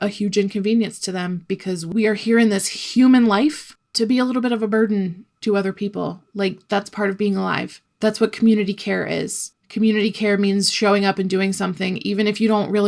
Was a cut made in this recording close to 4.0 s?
no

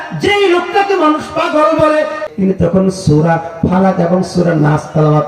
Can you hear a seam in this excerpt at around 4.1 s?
no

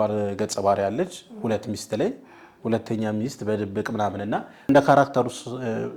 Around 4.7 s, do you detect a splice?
yes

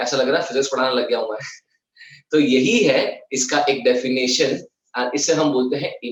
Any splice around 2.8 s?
no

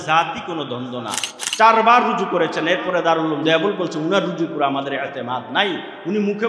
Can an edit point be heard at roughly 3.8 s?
no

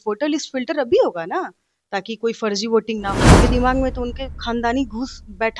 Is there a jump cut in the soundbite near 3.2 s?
yes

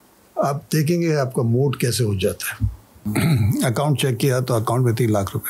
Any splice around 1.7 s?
no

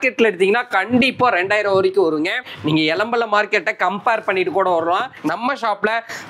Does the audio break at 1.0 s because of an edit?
no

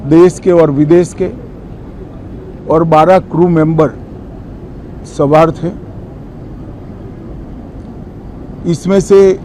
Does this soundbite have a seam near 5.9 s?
no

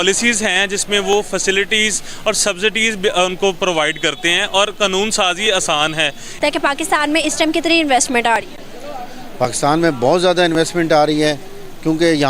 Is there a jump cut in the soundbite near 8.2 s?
no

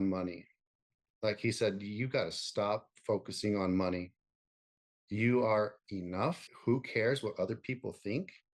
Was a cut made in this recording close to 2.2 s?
no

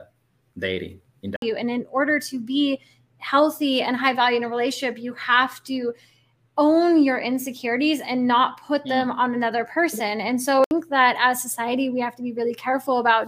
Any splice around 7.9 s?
no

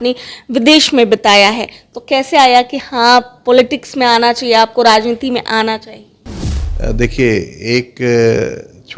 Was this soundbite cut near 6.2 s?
no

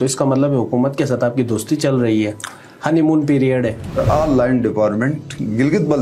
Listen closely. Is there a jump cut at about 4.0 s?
yes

